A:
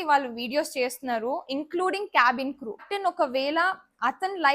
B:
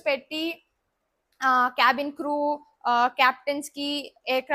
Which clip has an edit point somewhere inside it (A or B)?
A